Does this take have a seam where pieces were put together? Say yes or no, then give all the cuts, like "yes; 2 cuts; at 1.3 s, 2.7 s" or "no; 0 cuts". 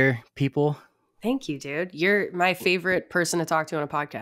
no; 0 cuts